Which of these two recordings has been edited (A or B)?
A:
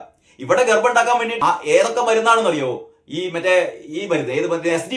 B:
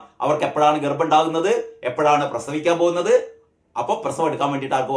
A